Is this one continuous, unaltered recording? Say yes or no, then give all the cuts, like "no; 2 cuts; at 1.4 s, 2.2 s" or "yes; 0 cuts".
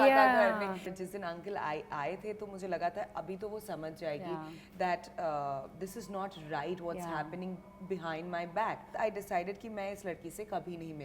no; 2 cuts; at 0.9 s, 8.9 s